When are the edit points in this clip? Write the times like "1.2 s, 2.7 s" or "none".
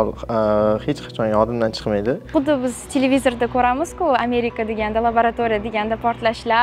2.3 s